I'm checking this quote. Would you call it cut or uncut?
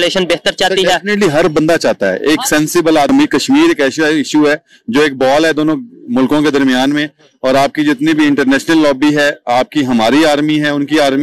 cut